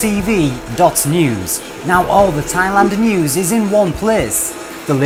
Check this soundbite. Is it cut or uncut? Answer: uncut